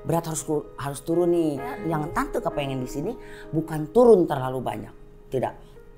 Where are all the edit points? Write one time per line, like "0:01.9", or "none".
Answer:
0:01.8